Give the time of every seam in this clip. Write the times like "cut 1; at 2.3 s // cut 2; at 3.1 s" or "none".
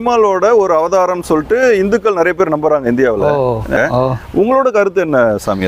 cut 1; at 3.8 s